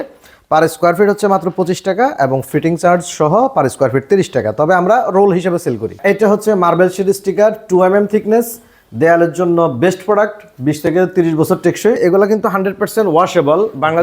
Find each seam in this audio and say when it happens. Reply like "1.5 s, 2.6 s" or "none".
6.0 s, 12.0 s